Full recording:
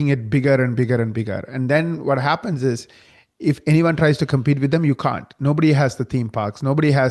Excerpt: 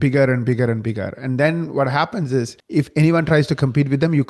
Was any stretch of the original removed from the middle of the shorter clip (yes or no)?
yes